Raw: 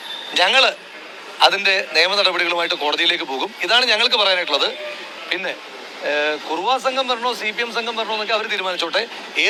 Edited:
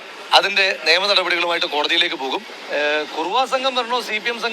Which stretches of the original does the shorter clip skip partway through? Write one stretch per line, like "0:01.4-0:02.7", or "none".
0:03.6-0:05.8